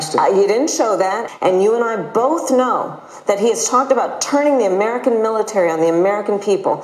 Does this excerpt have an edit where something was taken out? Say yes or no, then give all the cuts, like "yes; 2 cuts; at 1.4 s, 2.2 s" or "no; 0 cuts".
yes; 1 cut; at 1.2 s